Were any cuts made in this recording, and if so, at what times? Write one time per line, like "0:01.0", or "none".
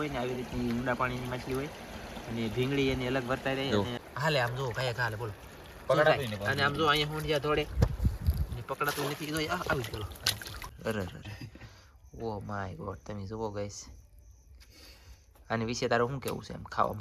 0:04.0
0:10.6